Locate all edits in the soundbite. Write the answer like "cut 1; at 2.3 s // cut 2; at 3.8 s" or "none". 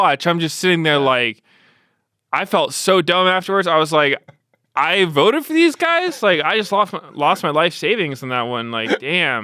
none